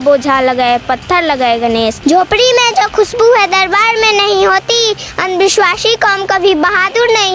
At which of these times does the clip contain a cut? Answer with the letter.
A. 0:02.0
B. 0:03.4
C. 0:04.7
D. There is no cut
A